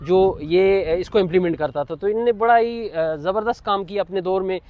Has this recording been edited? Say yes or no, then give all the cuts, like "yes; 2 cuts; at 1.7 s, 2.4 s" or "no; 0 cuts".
no; 0 cuts